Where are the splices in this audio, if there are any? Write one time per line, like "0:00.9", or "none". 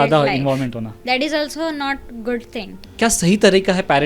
0:00.9
0:02.8

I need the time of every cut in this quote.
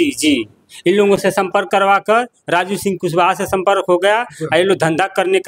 none

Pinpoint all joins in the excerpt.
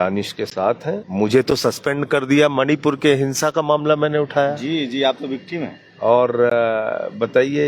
0:01.0

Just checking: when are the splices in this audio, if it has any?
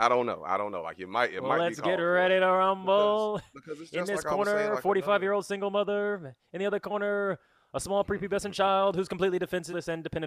none

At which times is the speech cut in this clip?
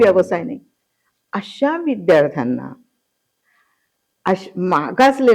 none

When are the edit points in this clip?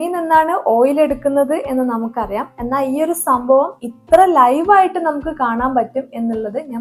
none

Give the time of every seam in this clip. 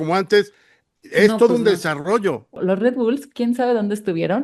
0:02.5

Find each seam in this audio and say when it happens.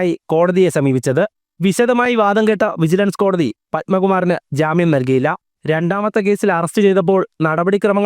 0:01.4
0:05.5

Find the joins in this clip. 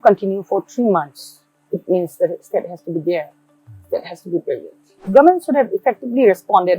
0:05.0

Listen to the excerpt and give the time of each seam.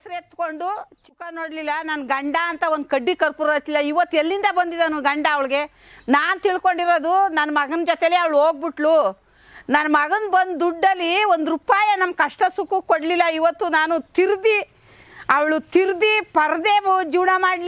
0:00.9

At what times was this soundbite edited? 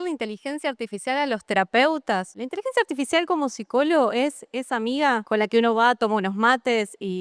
0:02.3
0:05.2

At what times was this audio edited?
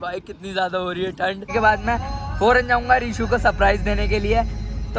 0:01.5

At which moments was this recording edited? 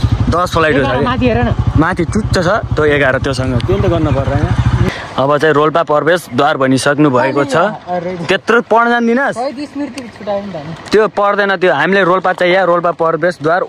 0:04.9

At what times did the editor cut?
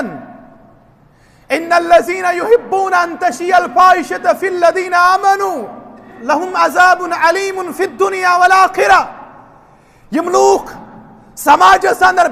0:06.1

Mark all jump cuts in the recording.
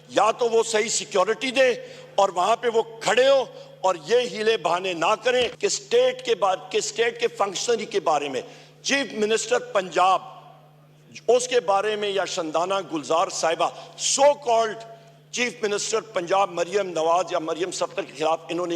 0:05.5

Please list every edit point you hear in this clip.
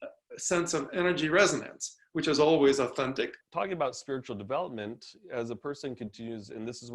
0:03.4

